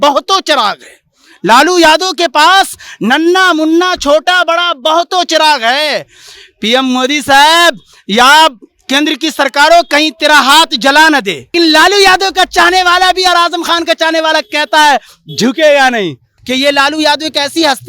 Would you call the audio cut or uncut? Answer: cut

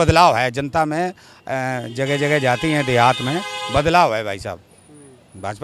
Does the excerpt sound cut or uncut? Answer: uncut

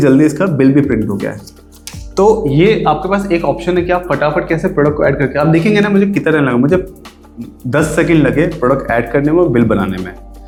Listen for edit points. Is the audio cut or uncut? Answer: uncut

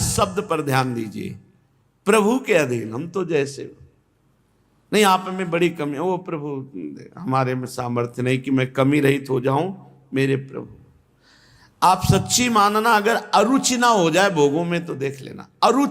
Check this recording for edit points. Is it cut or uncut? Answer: uncut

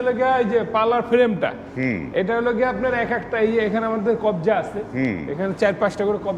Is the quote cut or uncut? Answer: uncut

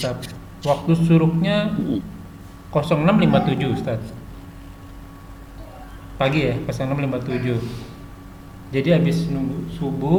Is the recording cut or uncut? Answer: uncut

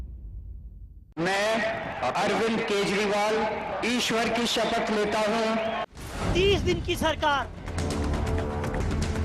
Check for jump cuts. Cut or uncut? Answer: cut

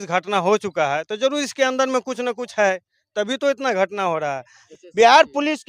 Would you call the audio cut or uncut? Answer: cut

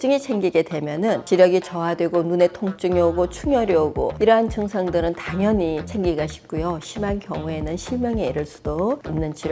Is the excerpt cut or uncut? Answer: uncut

